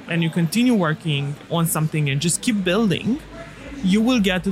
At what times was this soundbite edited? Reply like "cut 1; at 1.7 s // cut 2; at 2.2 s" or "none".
cut 1; at 1.5 s